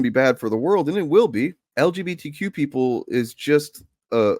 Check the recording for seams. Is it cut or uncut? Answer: cut